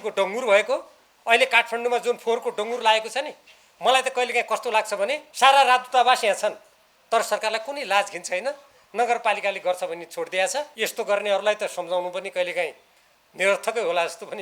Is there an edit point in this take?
yes; 2 cuts; at 5.2 s, 10.8 s

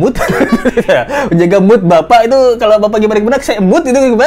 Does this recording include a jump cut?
no; 0 cuts

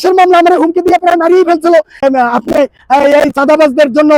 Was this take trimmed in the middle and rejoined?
yes; 1 cut; at 2.3 s

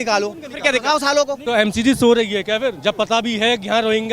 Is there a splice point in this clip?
yes; 1 cut; at 1.4 s

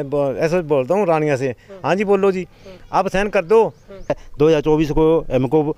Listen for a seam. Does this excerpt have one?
yes; 1 cut; at 4.2 s

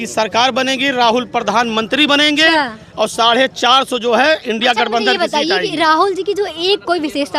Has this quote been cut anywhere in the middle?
no; 0 cuts

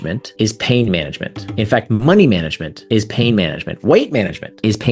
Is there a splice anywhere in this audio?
no; 0 cuts

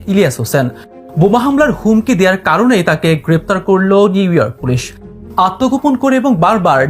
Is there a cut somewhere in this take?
no; 0 cuts

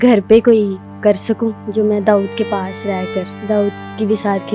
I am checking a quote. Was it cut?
yes; 2 cuts; at 1.6 s, 3.3 s

